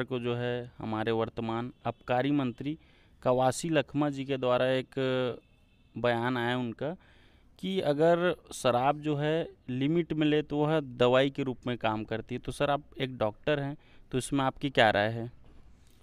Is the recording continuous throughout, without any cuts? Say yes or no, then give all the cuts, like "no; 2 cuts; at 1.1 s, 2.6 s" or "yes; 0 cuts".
yes; 0 cuts